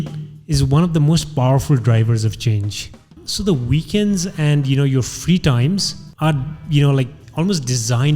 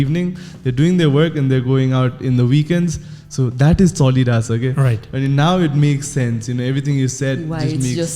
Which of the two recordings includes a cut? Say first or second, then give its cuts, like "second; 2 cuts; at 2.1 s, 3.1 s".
first; 3 cuts; at 3.2 s, 6.0 s, 7.2 s